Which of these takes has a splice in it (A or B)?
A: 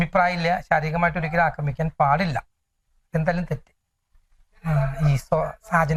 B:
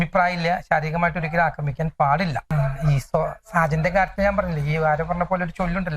B